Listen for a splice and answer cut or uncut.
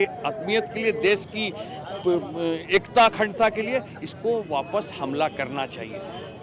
uncut